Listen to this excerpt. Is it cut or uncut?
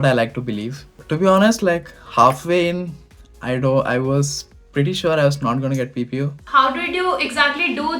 cut